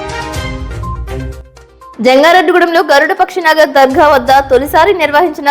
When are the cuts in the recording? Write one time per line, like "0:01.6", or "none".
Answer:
0:01.2